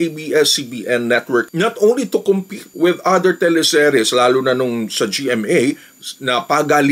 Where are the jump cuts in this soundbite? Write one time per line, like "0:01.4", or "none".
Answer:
0:01.5
0:05.9